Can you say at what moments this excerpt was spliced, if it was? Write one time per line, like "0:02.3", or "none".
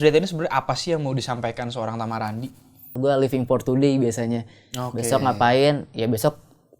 0:02.9

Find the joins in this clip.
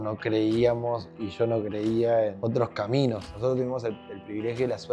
0:02.4
0:03.3

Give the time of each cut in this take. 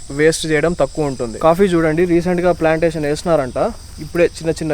0:01.4

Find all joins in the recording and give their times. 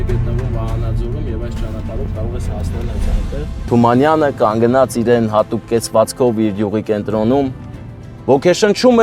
0:03.7

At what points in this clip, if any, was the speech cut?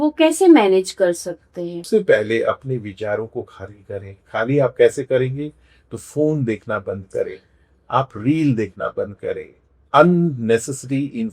0:01.8

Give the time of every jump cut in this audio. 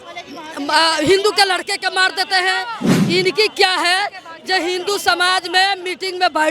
0:02.9

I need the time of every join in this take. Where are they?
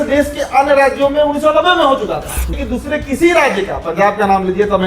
0:02.6

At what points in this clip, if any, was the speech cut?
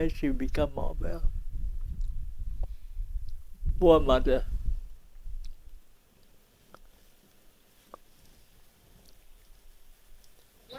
none

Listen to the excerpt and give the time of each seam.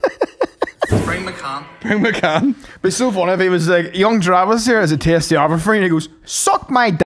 0:00.9

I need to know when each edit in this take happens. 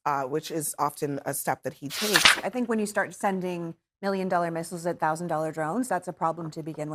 0:02.4

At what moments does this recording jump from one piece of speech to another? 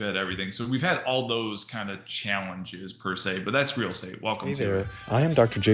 0:04.6

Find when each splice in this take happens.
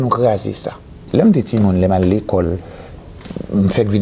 0:01.1

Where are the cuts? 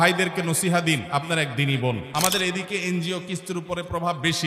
0:01.0
0:02.1

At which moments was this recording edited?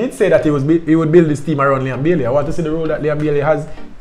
none

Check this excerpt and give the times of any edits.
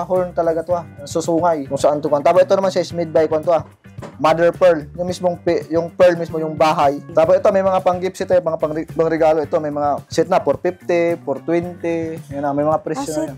0:01.6
0:07.0
0:08.8
0:10.0

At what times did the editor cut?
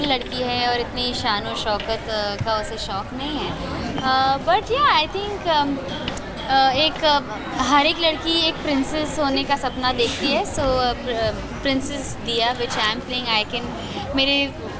none

